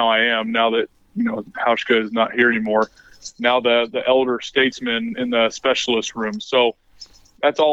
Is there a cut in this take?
no; 0 cuts

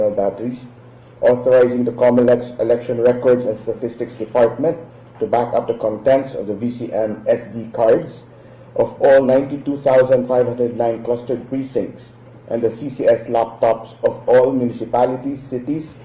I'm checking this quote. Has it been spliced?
yes; 1 cut; at 4.5 s

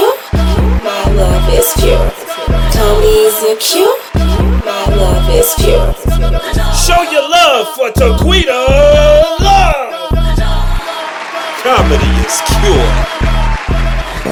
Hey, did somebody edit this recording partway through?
no; 0 cuts

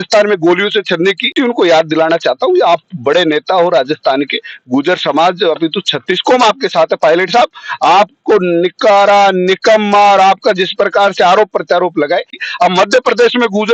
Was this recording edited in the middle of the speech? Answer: yes; 2 cuts; at 1.3 s, 12.4 s

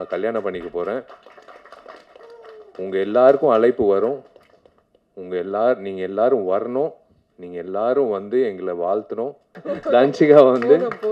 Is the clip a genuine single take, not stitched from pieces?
no; 1 cut; at 9.5 s

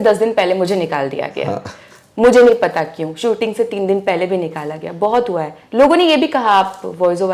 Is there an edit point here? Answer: yes; 1 cut; at 5.6 s

